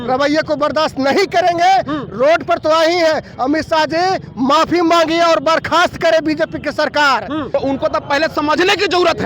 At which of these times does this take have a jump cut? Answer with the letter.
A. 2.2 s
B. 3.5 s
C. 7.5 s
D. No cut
C